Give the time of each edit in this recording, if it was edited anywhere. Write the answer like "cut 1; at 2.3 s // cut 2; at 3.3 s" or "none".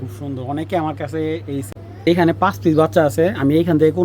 cut 1; at 1.7 s

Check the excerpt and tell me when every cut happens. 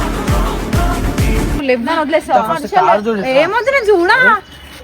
cut 1; at 1.6 s

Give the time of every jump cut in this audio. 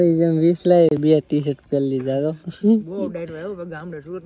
none

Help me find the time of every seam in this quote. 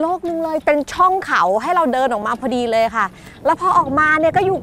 none

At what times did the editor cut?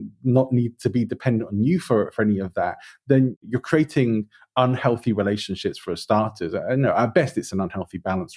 cut 1; at 3.4 s

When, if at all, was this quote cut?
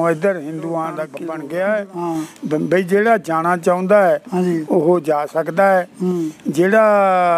cut 1; at 1.1 s

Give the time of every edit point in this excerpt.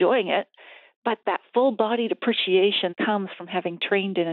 cut 1; at 1.2 s // cut 2; at 2.9 s

